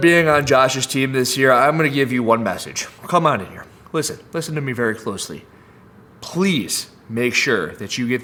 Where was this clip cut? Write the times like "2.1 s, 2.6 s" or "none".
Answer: none